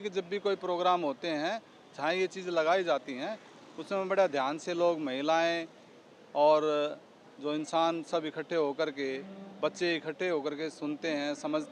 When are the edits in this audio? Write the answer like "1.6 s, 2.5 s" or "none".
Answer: none